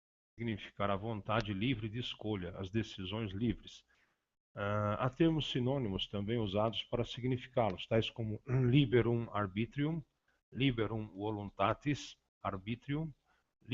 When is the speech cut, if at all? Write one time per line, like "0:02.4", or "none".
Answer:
0:07.2